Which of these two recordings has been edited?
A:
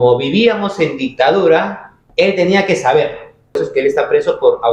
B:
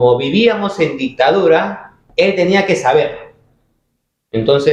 A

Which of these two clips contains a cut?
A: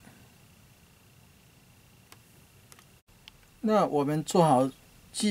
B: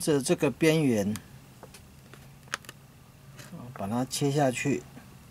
A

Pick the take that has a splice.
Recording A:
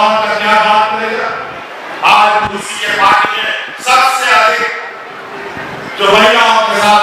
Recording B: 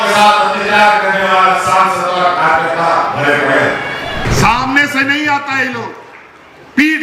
B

